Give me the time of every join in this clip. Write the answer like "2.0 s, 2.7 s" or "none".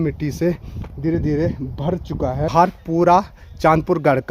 2.5 s